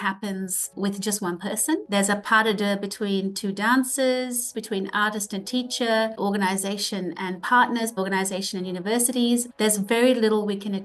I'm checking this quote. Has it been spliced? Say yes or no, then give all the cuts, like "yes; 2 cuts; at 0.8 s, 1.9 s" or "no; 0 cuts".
yes; 4 cuts; at 4.5 s, 6.2 s, 7.9 s, 9.5 s